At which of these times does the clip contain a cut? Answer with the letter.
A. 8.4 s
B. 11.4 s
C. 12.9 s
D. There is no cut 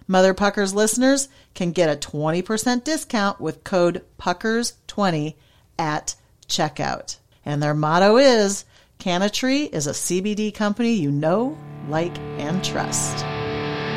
C